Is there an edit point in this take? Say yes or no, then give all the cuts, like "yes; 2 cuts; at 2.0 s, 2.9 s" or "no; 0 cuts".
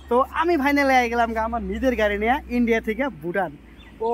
no; 0 cuts